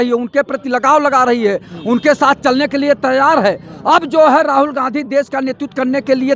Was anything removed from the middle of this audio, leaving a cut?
no; 0 cuts

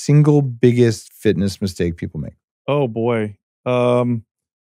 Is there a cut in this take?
no; 0 cuts

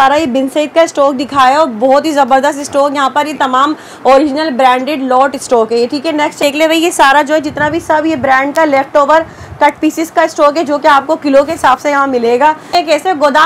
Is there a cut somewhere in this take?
yes; 2 cuts; at 6.4 s, 12.7 s

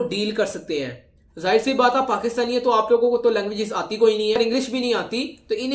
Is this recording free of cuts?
no; 1 cut; at 4.4 s

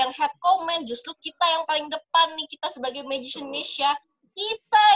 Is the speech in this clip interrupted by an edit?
no; 0 cuts

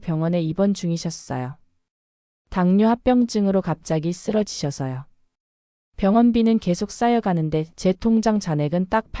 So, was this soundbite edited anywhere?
yes; 1 cut; at 7.7 s

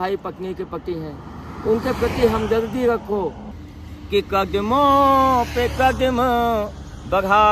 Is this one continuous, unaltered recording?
no; 1 cut; at 3.5 s

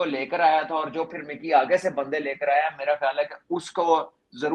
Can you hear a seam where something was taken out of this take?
no; 0 cuts

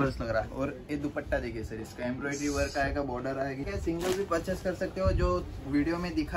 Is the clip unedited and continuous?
no; 1 cut; at 3.7 s

